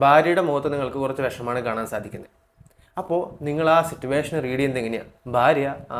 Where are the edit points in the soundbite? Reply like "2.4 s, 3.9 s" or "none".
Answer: none

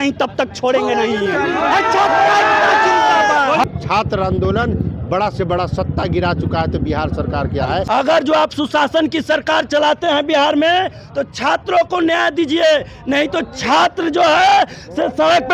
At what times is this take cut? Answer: 3.6 s, 7.8 s

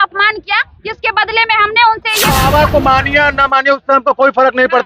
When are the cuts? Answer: 2.2 s

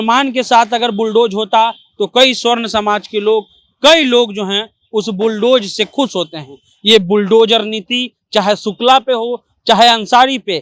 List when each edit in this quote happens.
none

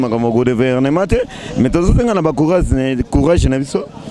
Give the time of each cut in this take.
none

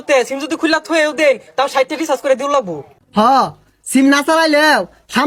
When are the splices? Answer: none

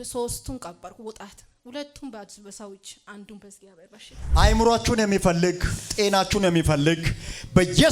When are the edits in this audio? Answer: 4.2 s

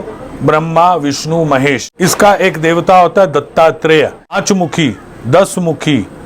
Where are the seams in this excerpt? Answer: 1.9 s, 4.4 s

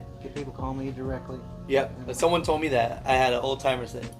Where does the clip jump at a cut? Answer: 2.0 s

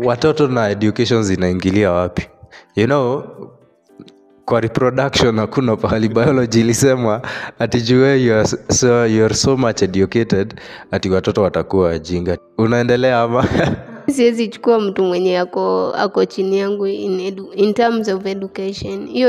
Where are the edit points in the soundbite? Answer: 12.4 s, 14.1 s

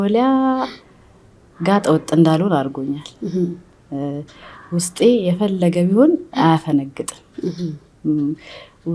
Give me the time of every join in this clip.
none

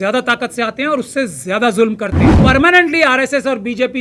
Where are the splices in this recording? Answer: 2.3 s

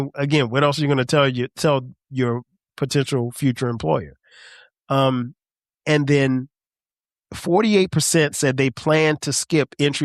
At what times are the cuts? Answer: none

